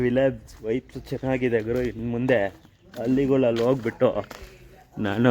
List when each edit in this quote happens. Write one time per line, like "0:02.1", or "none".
0:02.0